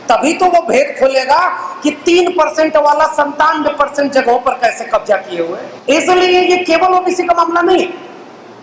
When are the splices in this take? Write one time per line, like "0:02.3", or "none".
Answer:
none